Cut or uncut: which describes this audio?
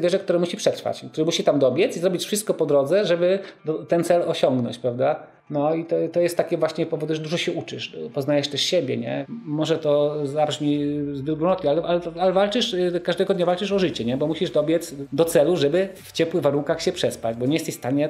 cut